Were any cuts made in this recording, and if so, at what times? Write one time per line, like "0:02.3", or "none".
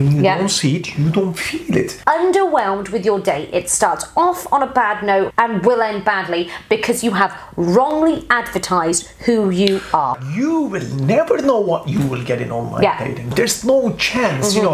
0:01.9
0:05.3
0:10.2
0:13.3